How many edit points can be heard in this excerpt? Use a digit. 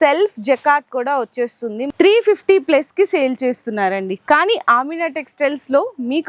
1